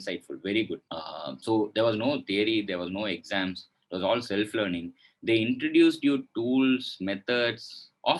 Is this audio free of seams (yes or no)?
yes